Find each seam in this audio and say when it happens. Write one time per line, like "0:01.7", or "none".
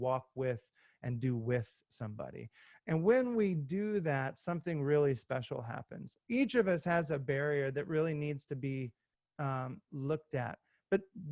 0:06.1